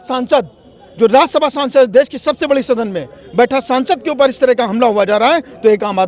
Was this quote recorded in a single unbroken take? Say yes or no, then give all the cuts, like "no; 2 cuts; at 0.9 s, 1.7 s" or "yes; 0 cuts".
yes; 0 cuts